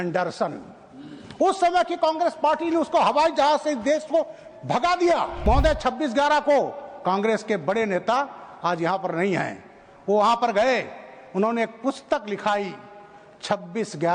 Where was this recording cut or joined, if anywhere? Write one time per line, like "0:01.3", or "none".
0:05.4